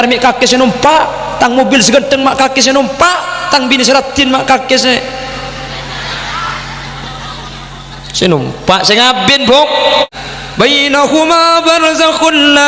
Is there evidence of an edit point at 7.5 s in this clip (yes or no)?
no